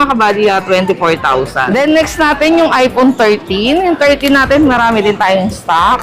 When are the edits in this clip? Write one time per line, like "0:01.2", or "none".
0:01.7